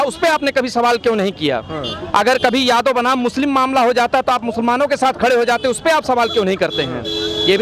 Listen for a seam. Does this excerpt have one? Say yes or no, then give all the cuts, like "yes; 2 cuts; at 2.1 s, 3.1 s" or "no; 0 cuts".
no; 0 cuts